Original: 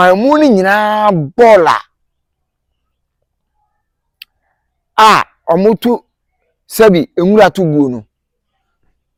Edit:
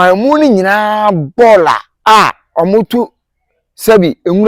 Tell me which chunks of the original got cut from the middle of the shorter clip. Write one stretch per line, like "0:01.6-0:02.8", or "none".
0:01.9-0:04.8

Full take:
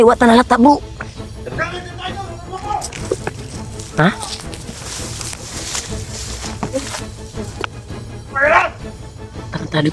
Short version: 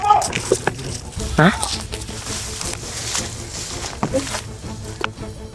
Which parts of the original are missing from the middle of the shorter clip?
none

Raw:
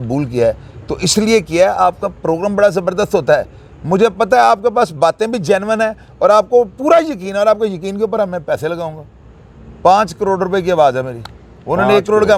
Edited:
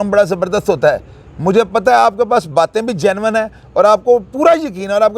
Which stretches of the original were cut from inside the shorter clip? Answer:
none

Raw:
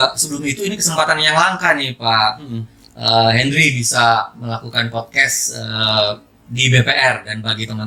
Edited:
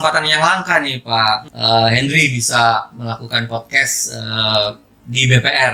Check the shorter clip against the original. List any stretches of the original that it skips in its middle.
0:02.4-0:02.9

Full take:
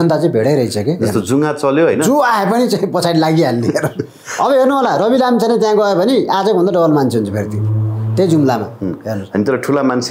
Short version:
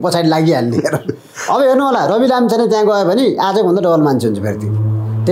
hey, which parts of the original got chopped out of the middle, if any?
none

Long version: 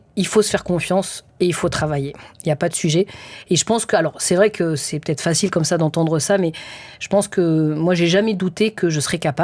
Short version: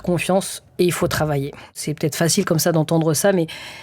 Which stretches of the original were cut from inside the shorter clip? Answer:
0:02.4-0:04.8

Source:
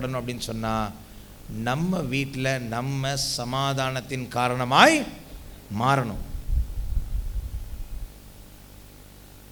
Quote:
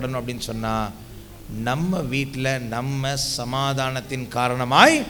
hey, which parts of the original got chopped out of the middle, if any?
none

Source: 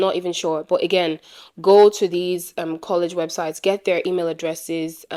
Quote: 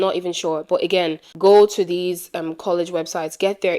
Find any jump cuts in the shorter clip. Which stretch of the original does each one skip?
0:01.2-0:01.5

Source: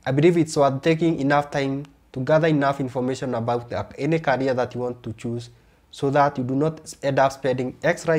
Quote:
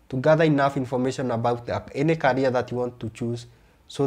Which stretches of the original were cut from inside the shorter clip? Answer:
none

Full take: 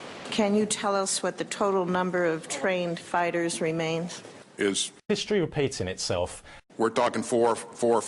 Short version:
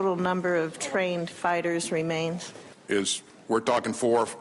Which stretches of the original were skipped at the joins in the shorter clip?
0:04.9-0:06.5

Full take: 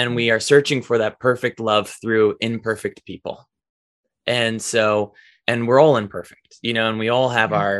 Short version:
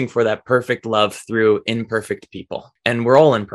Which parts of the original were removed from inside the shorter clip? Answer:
0:03.4-0:05.3

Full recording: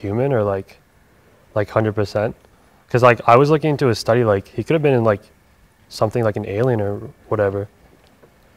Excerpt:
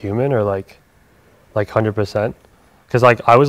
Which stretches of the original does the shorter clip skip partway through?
none

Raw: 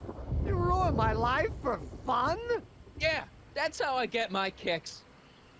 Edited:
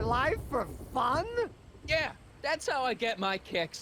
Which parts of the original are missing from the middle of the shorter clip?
none

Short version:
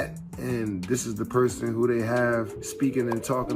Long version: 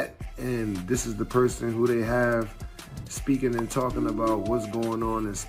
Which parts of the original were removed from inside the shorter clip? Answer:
0:02.6-0:03.1

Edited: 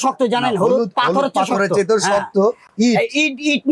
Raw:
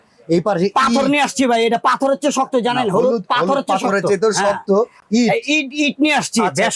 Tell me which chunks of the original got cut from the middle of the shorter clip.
none

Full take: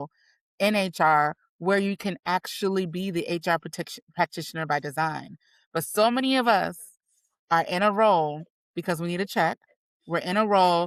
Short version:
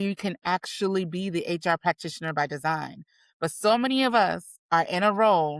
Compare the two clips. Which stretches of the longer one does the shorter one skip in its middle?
0:03.6-0:04.1
0:06.8-0:07.3

